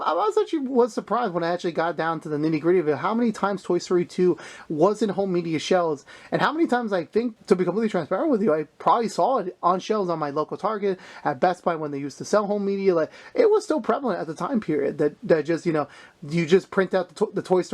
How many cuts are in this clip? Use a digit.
1